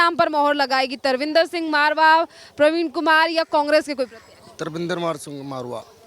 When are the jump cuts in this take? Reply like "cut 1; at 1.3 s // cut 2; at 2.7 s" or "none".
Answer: none